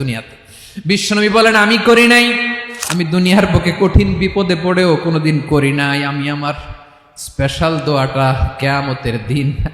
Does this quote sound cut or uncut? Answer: cut